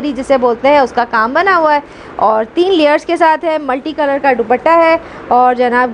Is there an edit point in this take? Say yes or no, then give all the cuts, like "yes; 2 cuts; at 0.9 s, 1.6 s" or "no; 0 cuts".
no; 0 cuts